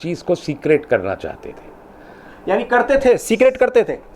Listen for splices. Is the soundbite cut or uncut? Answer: uncut